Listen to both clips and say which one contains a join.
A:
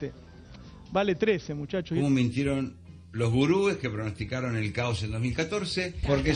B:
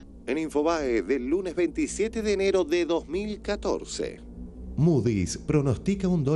A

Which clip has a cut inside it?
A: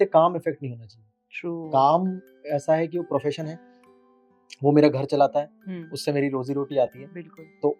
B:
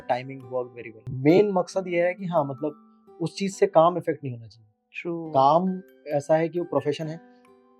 B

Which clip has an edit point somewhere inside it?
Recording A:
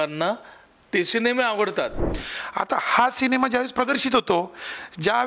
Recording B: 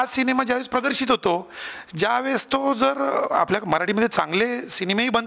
A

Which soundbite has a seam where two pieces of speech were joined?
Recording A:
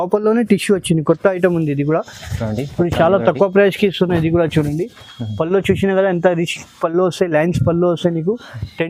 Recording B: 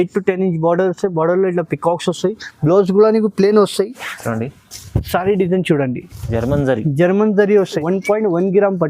B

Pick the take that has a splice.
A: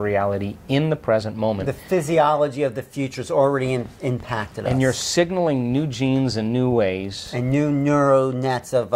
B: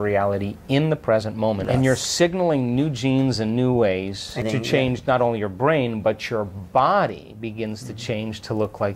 B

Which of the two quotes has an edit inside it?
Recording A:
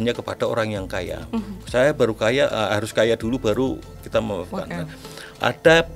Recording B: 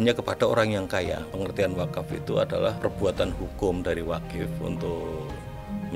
B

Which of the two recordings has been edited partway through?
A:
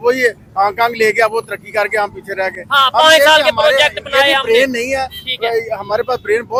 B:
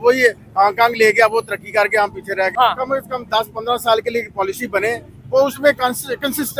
B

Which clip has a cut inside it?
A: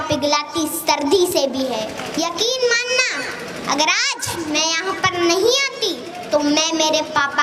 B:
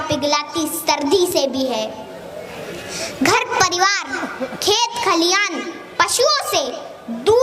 A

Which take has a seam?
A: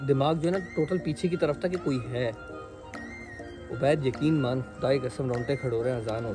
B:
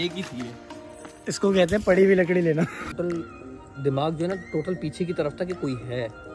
B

